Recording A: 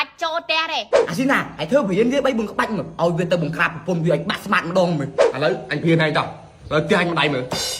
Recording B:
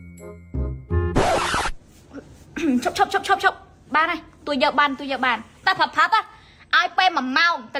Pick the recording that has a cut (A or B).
A